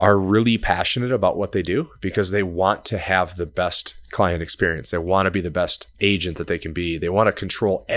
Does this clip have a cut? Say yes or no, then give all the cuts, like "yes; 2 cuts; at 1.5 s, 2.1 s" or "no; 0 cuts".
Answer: no; 0 cuts